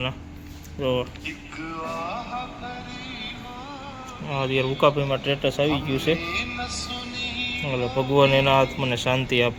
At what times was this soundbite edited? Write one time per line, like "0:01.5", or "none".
none